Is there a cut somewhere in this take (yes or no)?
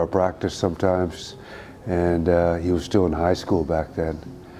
no